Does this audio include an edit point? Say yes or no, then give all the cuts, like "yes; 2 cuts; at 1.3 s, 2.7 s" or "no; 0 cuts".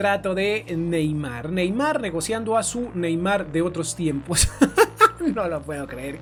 no; 0 cuts